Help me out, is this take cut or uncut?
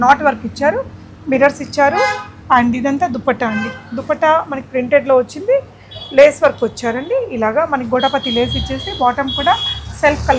uncut